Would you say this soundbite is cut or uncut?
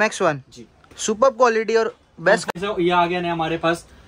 cut